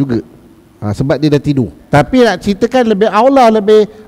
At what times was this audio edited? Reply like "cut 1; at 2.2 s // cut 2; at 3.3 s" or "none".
cut 1; at 1.8 s